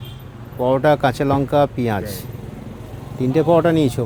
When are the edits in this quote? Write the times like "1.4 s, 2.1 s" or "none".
none